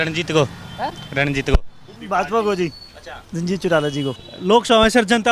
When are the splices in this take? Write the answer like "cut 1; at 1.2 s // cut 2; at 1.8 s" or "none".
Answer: cut 1; at 1.9 s // cut 2; at 4.3 s